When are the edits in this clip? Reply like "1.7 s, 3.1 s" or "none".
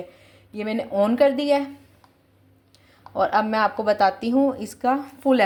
none